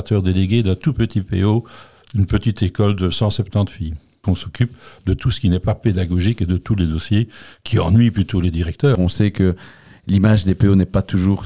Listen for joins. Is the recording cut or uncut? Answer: cut